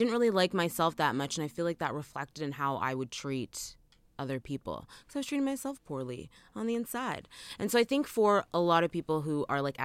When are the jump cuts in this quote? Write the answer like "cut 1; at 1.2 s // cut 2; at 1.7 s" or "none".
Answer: none